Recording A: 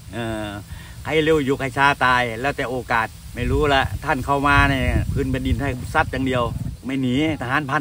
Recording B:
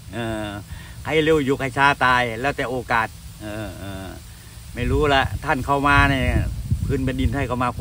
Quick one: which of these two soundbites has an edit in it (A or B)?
A